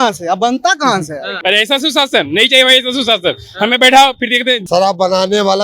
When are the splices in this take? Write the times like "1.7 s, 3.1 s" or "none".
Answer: 1.3 s, 4.6 s